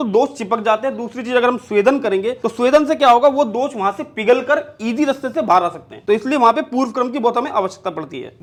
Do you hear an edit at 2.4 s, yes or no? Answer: no